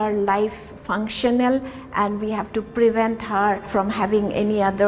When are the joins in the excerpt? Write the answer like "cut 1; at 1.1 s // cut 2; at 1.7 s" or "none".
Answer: cut 1; at 3.7 s